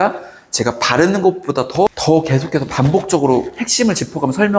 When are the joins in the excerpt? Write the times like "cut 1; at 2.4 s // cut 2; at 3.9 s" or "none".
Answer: cut 1; at 1.9 s